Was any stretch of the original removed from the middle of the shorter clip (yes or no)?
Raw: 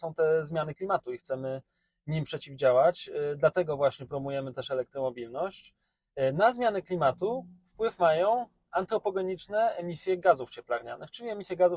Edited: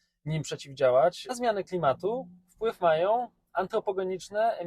yes